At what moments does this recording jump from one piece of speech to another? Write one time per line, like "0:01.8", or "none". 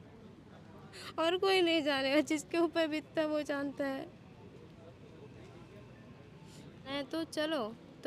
0:06.9